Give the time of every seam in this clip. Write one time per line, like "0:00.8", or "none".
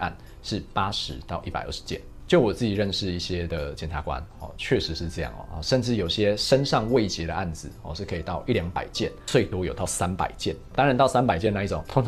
none